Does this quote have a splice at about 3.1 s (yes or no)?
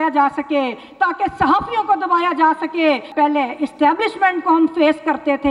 yes